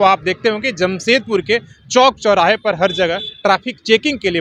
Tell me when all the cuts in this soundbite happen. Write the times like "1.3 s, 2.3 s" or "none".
none